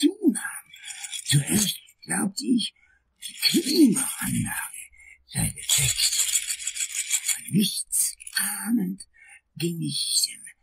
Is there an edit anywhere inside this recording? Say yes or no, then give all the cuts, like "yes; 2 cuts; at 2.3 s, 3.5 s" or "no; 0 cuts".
no; 0 cuts